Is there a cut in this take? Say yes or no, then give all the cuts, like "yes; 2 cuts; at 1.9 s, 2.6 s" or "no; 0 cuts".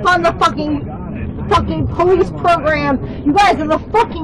no; 0 cuts